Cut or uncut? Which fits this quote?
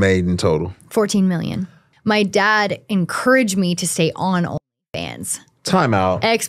cut